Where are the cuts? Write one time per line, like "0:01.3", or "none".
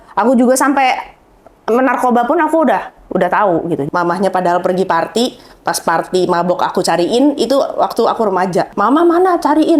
0:03.8
0:08.7